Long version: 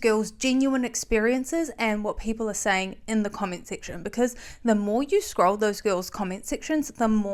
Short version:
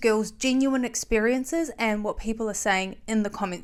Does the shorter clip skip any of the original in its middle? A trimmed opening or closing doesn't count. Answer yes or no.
no